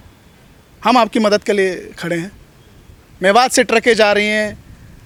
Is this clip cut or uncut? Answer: uncut